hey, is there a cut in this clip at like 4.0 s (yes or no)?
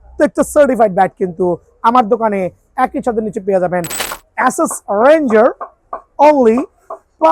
yes